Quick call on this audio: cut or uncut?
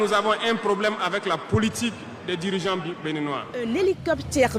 cut